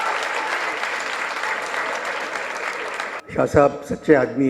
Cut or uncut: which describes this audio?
cut